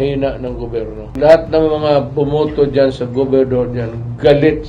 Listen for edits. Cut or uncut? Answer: cut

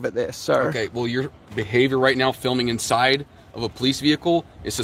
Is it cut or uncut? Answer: uncut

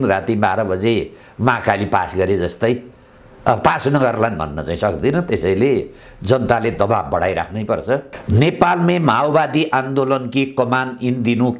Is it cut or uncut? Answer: cut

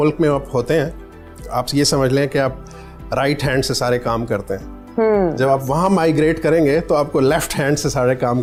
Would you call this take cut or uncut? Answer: uncut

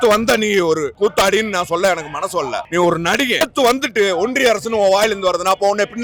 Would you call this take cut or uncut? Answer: uncut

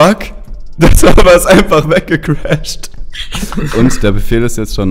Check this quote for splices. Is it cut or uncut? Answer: cut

